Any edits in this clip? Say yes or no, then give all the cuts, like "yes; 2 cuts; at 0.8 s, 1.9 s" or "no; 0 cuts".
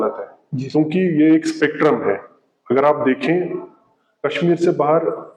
no; 0 cuts